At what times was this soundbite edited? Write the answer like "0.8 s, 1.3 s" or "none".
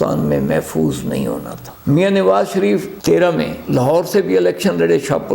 1.7 s